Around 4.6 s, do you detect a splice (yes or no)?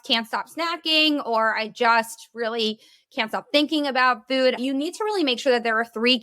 yes